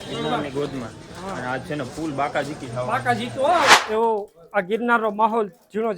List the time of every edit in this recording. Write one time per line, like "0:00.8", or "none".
0:03.8